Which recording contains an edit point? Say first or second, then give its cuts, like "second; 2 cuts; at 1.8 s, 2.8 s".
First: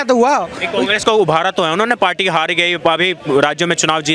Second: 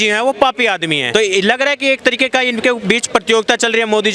second; 1 cut; at 1.0 s